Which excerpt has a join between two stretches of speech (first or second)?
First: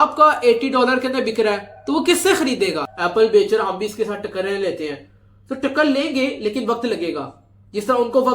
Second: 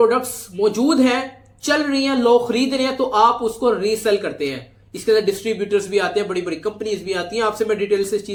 first